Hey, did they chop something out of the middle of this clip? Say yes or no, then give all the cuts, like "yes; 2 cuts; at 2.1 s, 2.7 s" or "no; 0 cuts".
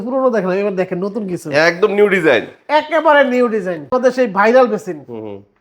yes; 1 cut; at 3.9 s